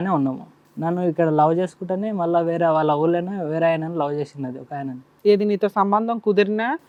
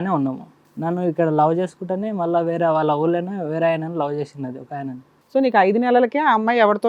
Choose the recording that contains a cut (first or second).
second